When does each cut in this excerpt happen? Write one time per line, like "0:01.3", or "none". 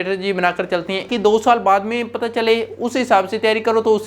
0:01.1